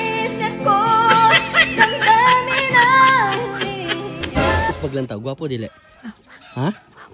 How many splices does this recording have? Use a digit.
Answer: 1